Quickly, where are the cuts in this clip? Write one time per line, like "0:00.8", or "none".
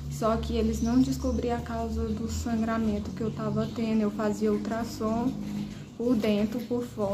none